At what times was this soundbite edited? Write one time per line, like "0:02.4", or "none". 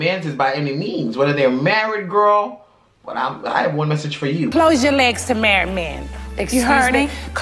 none